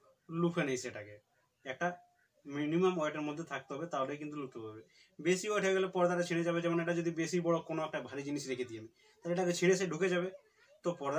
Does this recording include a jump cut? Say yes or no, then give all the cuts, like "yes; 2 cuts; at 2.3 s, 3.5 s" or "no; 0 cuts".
no; 0 cuts